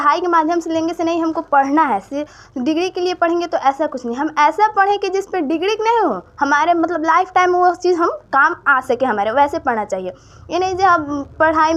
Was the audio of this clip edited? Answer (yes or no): no